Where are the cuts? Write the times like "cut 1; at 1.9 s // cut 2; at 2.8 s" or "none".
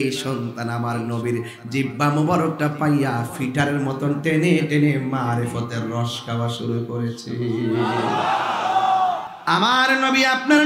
cut 1; at 9.2 s